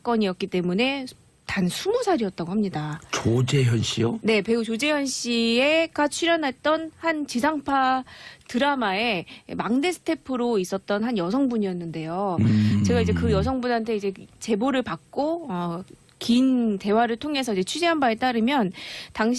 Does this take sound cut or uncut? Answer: cut